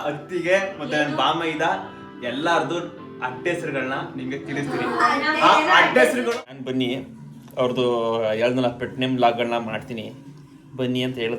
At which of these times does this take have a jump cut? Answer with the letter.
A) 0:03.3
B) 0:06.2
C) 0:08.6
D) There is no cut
B